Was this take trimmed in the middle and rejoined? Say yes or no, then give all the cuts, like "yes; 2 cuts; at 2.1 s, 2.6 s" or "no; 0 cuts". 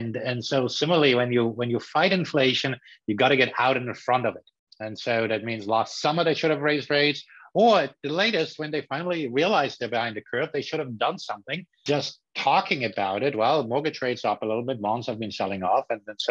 yes; 1 cut; at 11.8 s